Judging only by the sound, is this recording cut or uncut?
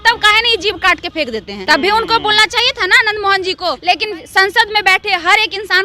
cut